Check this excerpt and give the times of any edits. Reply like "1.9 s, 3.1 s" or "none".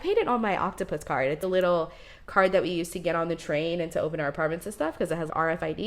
1.4 s